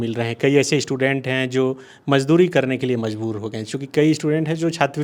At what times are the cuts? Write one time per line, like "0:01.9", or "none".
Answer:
none